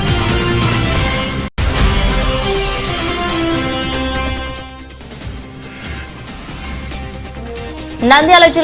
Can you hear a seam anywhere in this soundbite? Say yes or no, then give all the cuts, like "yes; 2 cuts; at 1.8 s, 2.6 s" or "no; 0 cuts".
yes; 2 cuts; at 5.6 s, 7.0 s